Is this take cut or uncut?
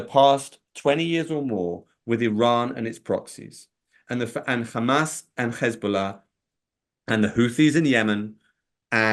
uncut